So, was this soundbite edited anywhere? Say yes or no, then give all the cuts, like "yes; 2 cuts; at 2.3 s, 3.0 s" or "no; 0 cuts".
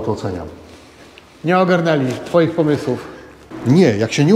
yes; 1 cut; at 3.4 s